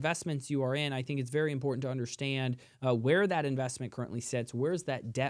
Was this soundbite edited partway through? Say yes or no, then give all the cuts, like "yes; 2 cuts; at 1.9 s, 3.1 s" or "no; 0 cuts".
no; 0 cuts